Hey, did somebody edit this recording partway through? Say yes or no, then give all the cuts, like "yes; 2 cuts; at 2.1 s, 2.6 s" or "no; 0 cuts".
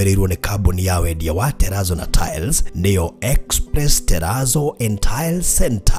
no; 0 cuts